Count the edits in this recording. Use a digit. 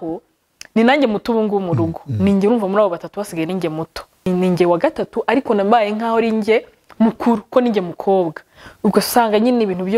1